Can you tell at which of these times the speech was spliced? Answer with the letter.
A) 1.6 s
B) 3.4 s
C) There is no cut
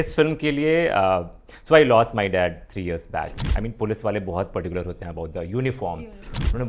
B